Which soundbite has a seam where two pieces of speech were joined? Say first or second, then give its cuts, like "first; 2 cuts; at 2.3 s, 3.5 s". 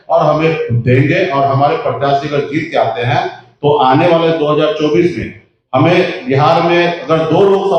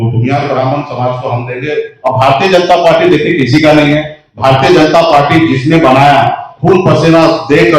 second; 1 cut; at 1.9 s